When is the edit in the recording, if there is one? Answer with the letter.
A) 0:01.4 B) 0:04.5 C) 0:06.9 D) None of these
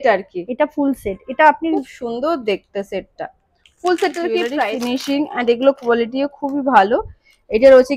B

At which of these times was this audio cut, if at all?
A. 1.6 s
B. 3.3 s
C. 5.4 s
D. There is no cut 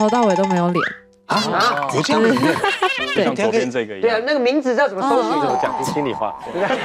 C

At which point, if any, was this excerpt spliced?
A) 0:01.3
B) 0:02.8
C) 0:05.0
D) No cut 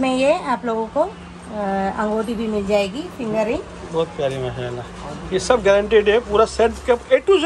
D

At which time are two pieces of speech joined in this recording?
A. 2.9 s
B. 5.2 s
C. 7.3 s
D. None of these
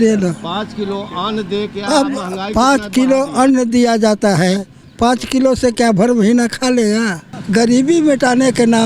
C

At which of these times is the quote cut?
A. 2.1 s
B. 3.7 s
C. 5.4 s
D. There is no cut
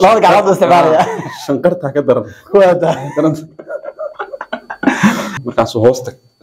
C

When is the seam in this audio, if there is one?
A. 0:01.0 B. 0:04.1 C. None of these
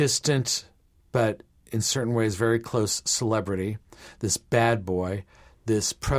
C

